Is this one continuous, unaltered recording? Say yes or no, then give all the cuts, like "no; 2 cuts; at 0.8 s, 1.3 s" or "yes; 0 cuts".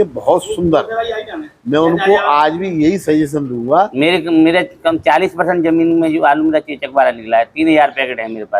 no; 1 cut; at 3.9 s